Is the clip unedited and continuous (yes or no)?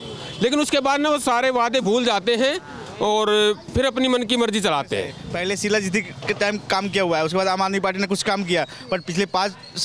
no